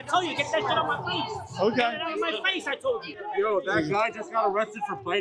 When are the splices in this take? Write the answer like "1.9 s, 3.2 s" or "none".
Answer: 3.2 s